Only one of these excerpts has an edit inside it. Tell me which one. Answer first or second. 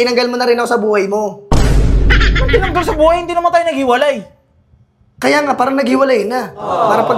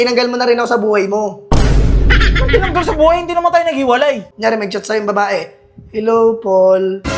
second